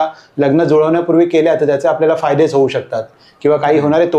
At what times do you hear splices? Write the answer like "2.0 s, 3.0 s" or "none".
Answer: none